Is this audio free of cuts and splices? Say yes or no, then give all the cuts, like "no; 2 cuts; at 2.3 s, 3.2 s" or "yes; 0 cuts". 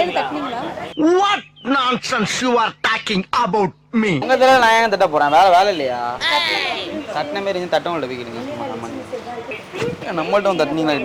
no; 2 cuts; at 4.3 s, 9.5 s